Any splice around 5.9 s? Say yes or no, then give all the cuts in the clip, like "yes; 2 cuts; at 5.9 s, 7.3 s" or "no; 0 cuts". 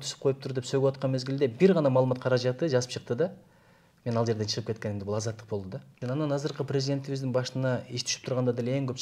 yes; 1 cut; at 5.9 s